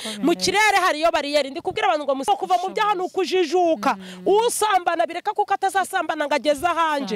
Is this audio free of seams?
no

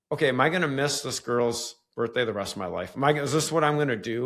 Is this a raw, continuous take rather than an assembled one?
yes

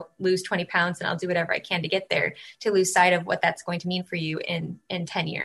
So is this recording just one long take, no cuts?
yes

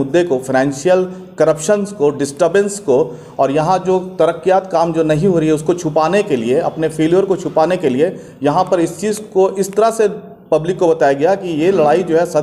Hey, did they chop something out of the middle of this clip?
no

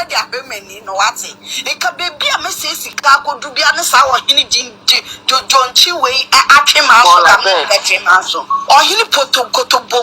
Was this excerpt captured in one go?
no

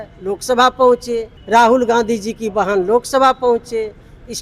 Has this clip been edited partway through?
yes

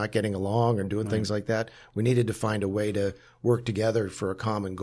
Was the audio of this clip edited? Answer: no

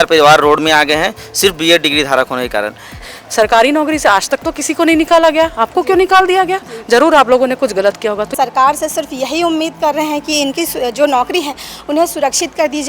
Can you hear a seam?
yes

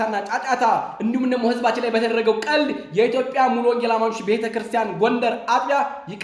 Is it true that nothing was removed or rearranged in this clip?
yes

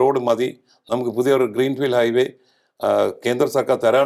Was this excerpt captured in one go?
yes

